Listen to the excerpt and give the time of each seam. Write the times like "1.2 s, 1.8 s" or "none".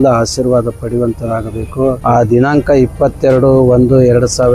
2.0 s